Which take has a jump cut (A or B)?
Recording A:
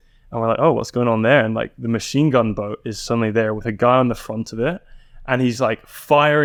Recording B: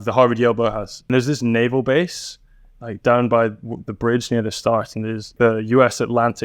B